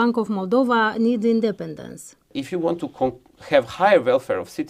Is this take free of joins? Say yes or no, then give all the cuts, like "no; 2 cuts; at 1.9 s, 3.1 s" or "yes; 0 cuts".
no; 1 cut; at 2.3 s